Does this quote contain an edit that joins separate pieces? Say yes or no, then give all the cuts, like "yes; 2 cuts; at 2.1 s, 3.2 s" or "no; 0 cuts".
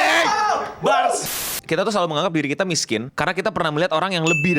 yes; 2 cuts; at 1.3 s, 3.1 s